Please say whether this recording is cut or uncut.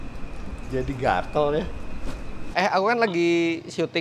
cut